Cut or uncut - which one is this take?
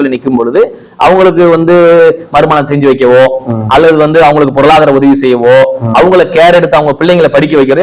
uncut